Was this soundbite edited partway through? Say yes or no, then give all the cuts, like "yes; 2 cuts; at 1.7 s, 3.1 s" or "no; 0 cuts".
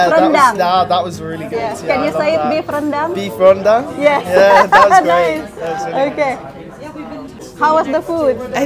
no; 0 cuts